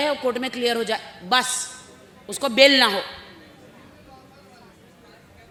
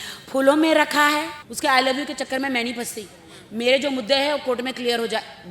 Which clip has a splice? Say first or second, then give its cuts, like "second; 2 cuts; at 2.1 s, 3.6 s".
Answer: second; 1 cut; at 1.4 s